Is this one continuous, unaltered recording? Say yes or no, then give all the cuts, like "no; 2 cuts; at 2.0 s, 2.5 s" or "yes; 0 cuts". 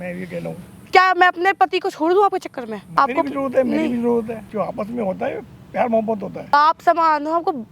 no; 4 cuts; at 0.9 s, 2.9 s, 4.4 s, 6.5 s